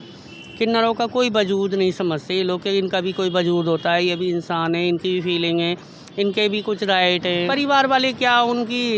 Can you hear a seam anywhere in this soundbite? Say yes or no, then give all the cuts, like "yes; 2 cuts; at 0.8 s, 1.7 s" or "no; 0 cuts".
yes; 1 cut; at 7.5 s